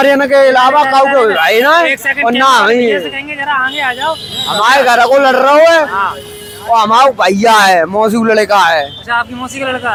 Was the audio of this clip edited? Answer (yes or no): no